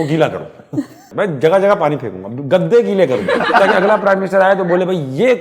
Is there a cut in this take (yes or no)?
yes